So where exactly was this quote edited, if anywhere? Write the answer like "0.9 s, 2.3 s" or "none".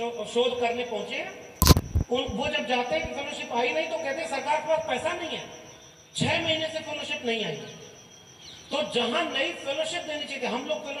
none